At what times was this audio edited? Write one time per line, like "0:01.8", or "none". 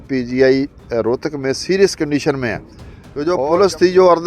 0:03.3

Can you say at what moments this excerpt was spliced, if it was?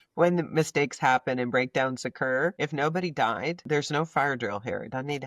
0:02.6
0:03.6

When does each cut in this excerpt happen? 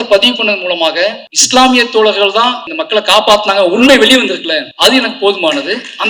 0:01.3
0:02.7
0:04.7

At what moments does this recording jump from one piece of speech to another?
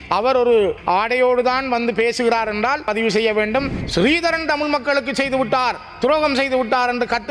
0:00.8
0:02.8
0:03.8

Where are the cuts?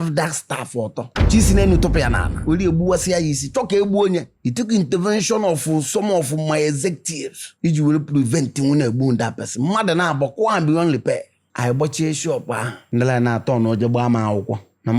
0:11.3
0:12.8

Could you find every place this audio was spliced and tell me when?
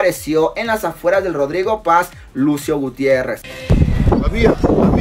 0:03.4

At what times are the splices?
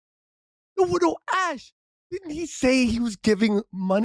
none

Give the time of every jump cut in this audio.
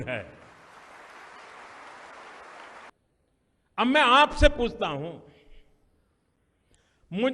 0:02.9

